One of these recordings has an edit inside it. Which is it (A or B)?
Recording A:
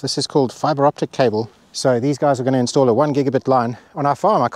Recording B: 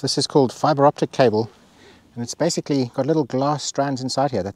A